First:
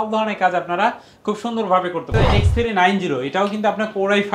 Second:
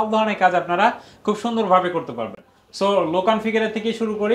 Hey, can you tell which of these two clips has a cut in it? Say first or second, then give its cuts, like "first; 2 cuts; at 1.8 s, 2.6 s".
first; 1 cut; at 2.1 s